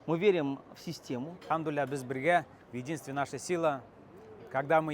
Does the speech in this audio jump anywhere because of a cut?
yes; 1 cut; at 1.3 s

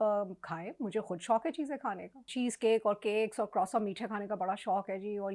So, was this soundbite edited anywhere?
yes; 1 cut; at 2.3 s

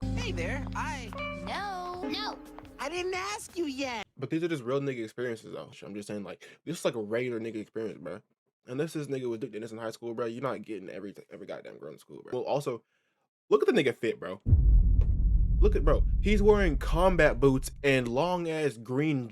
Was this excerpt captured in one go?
no; 2 cuts; at 5.7 s, 12.3 s

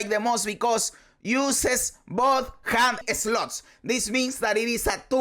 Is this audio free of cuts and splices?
no; 1 cut; at 3.0 s

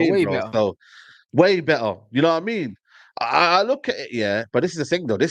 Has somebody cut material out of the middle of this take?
no; 0 cuts

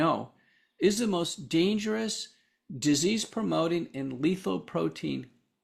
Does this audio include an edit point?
no; 0 cuts

